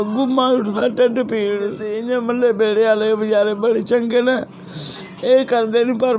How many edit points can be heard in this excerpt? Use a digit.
1